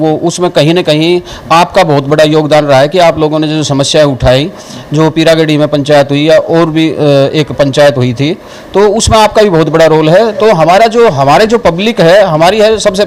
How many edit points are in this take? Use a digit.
0